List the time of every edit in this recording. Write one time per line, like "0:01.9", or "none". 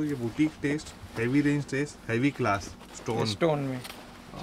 0:02.9